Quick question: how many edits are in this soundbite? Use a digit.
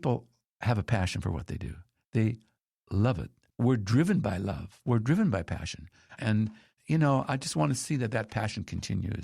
1